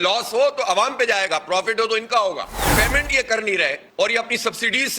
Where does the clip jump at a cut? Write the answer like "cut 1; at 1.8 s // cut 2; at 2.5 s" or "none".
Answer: cut 1; at 2.6 s